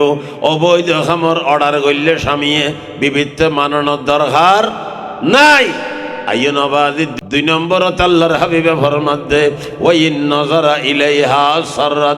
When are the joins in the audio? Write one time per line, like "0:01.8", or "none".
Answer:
0:07.1